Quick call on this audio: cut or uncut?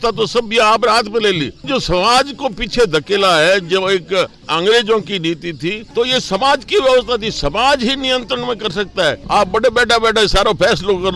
cut